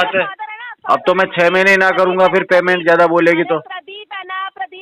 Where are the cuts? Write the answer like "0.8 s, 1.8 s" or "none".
none

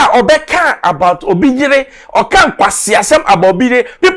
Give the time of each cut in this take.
none

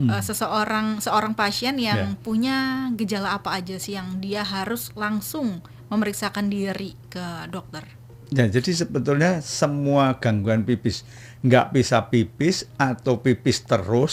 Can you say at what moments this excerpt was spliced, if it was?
none

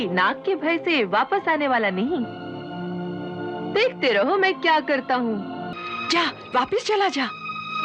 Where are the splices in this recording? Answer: 5.7 s

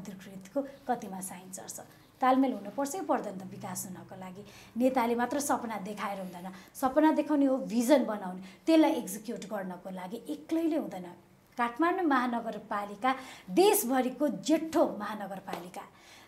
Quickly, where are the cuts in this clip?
none

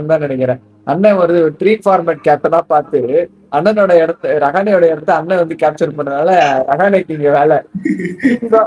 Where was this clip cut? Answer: none

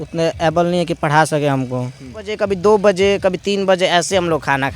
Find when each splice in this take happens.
2.3 s

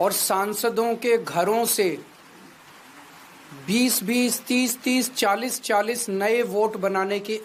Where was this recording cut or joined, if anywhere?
none

